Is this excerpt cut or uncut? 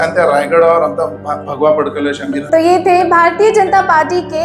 uncut